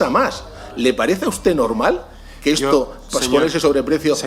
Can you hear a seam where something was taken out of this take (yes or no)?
no